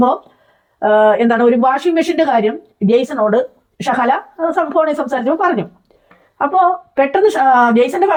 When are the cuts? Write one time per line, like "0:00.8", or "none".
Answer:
none

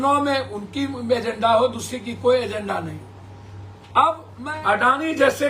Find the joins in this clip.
0:04.3

